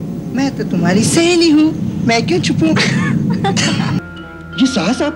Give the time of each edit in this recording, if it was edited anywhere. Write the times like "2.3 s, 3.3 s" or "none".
4.0 s

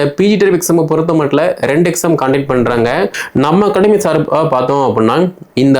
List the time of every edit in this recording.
3.2 s

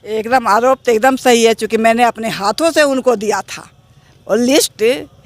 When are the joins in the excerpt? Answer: none

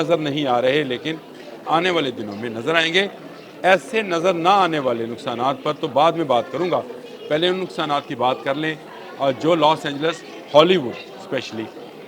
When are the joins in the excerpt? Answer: none

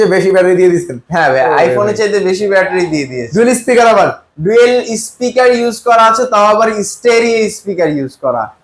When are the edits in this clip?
none

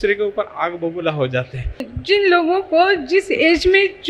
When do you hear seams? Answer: 1.9 s

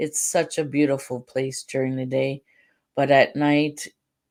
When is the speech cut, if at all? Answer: none

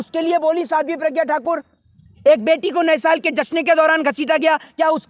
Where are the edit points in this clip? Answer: none

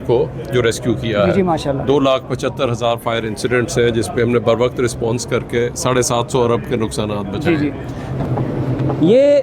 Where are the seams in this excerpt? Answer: 8.1 s

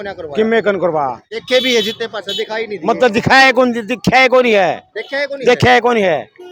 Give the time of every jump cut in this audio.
none

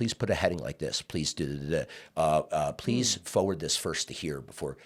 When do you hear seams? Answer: none

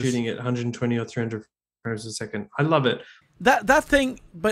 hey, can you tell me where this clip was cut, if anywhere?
3.2 s

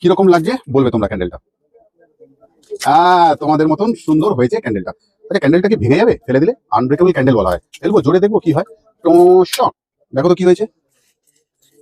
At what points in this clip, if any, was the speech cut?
none

